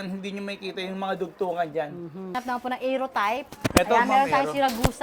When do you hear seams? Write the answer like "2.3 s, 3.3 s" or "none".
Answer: 2.3 s